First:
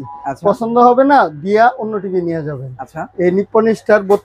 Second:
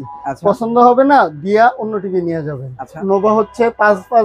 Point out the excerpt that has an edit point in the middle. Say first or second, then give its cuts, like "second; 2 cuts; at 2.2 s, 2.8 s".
second; 1 cut; at 3.0 s